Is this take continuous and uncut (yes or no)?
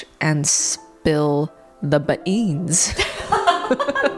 yes